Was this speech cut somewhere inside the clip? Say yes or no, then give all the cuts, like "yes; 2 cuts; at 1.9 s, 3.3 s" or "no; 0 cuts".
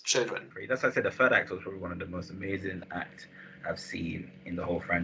yes; 1 cut; at 2.8 s